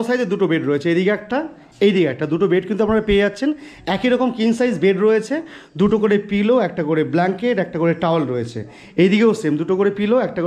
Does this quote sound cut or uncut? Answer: uncut